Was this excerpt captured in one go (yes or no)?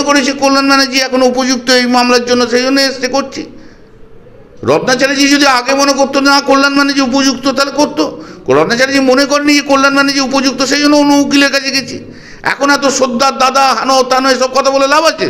yes